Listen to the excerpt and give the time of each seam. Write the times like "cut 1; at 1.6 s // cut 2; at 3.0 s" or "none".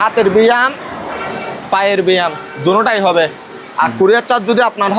cut 1; at 3.6 s

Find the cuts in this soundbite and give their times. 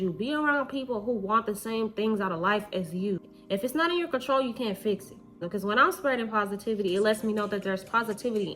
cut 1; at 3.3 s // cut 2; at 5.4 s

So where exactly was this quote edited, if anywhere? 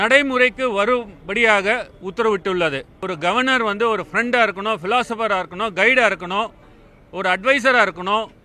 cut 1; at 2.9 s

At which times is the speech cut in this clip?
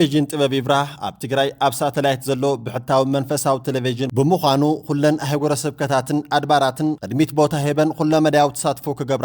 none

